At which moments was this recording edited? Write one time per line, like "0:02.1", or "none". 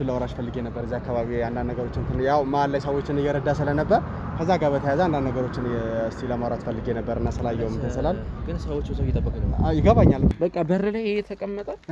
0:10.3